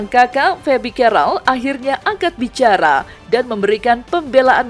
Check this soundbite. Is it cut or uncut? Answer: uncut